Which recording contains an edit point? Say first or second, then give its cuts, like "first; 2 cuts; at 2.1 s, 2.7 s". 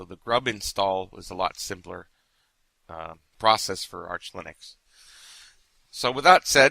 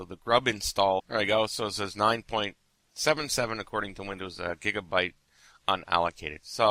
first; 1 cut; at 1.1 s